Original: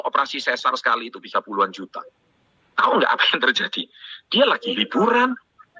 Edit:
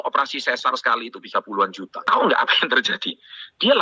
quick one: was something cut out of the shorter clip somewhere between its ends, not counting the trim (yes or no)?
yes